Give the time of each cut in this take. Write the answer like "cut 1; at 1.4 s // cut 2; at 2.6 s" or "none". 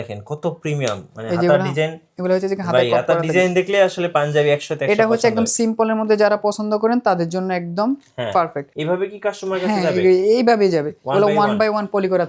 cut 1; at 8.7 s